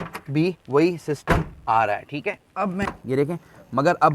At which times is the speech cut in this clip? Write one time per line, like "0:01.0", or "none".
0:02.9